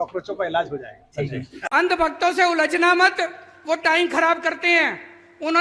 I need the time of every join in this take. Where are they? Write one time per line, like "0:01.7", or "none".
0:01.5

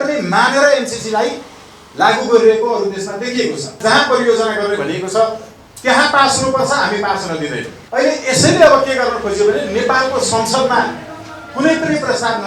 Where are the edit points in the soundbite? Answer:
0:03.8
0:07.7

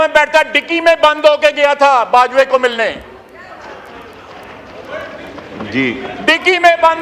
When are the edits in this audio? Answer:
none

